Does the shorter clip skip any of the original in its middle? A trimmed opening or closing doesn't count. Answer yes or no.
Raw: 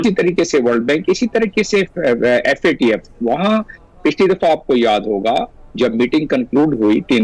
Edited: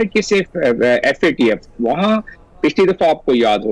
no